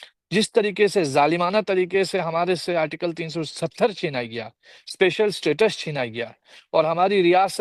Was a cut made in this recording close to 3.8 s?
no; 0 cuts

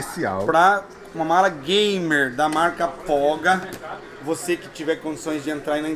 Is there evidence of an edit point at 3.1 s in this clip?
no; 0 cuts

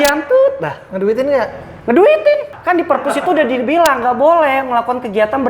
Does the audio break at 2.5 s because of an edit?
yes; 1 cut; at 2.5 s

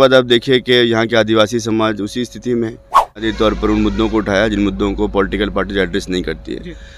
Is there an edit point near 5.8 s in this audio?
no; 1 cut; at 3.3 s

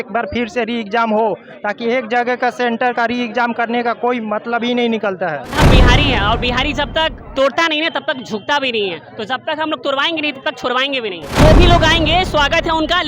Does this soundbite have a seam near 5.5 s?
yes; 2 cuts; at 5.5 s, 11.2 s

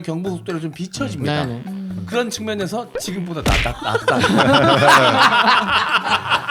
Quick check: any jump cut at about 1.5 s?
no; 0 cuts

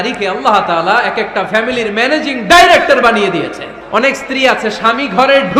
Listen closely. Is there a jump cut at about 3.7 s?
yes; 1 cut; at 3.7 s

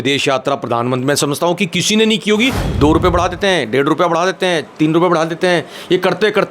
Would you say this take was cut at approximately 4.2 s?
no; 1 cut; at 2.6 s

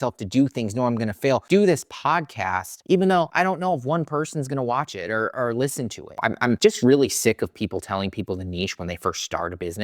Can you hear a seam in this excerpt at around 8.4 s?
no; 2 cuts; at 1.4 s, 6.4 s

